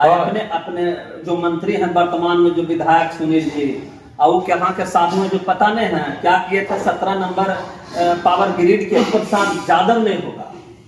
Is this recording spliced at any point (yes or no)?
yes